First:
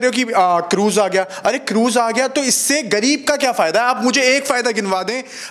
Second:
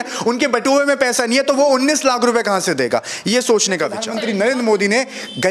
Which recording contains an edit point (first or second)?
second